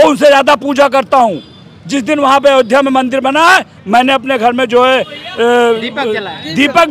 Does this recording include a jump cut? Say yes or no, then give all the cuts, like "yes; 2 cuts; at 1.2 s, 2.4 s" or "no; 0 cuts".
no; 0 cuts